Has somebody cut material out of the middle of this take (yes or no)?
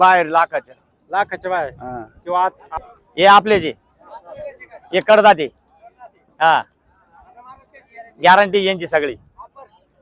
yes